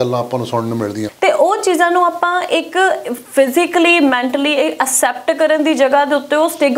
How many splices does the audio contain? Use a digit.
1